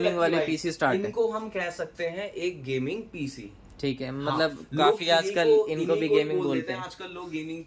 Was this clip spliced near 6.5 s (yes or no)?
no